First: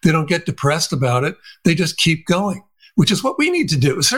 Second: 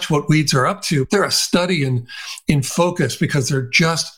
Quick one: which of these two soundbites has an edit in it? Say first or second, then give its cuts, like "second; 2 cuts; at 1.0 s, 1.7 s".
second; 1 cut; at 1.1 s